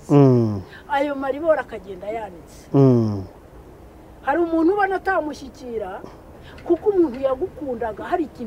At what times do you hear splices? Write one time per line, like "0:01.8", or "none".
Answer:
0:06.3